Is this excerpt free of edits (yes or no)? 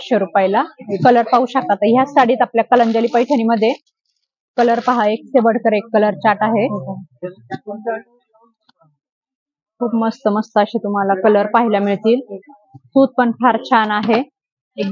yes